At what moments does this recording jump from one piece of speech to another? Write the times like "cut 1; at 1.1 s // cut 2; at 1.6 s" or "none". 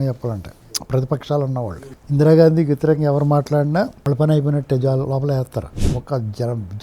cut 1; at 4.0 s // cut 2; at 5.8 s